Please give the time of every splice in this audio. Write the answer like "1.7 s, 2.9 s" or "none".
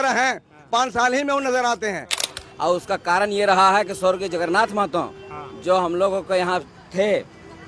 2.2 s